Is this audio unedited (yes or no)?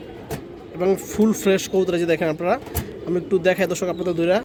yes